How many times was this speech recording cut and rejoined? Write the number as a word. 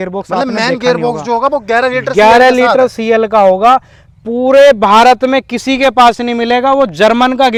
zero